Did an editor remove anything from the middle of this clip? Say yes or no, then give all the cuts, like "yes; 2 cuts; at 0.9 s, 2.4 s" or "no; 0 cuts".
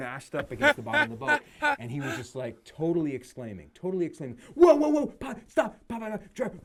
no; 0 cuts